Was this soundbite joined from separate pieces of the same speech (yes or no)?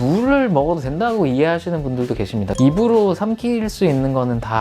yes